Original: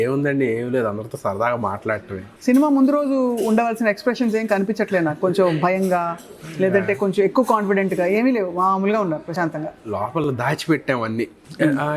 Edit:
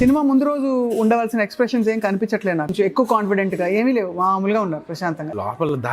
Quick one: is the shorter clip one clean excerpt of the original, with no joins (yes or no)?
no